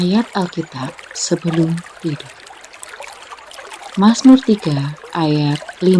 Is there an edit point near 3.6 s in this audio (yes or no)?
yes